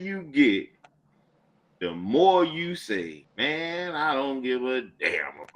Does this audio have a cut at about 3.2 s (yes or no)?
yes